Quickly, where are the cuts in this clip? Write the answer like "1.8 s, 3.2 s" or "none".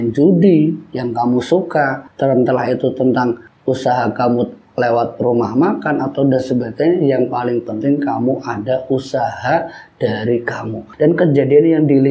10.8 s

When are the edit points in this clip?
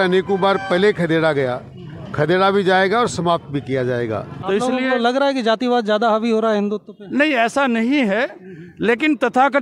4.3 s

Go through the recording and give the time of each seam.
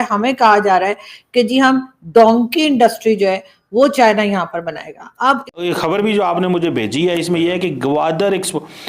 5.5 s

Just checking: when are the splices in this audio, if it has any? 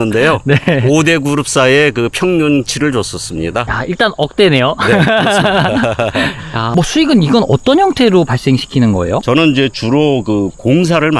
3.7 s, 6.7 s, 9.2 s

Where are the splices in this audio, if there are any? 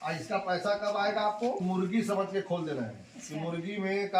1.6 s

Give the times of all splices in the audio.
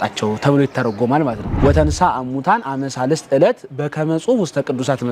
1.4 s

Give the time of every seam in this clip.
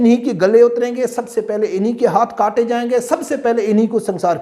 none

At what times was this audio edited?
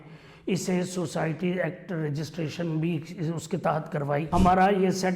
4.2 s

